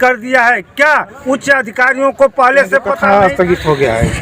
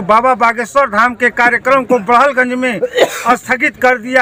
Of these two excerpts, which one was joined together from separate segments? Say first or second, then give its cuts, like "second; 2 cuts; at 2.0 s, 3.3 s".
first; 1 cut; at 2.9 s